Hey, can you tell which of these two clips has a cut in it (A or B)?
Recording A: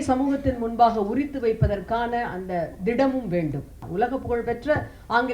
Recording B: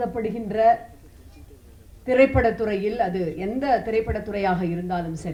A